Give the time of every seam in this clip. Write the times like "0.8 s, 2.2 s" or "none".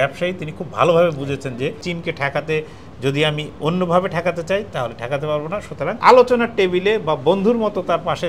1.8 s, 6.0 s

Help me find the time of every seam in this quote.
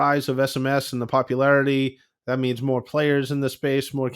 none

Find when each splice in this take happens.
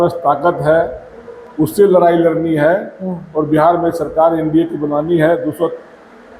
none

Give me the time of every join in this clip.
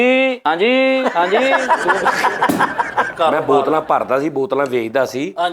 3.1 s

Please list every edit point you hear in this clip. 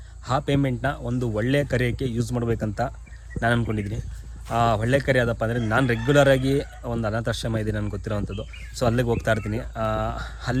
none

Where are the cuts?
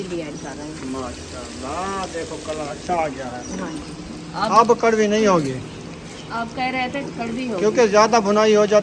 none

